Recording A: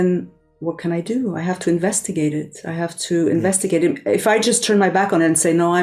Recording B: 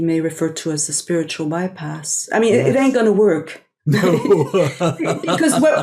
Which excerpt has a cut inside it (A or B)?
B